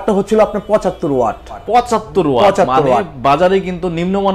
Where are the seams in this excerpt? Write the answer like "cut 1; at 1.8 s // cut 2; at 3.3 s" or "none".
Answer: cut 1; at 1.6 s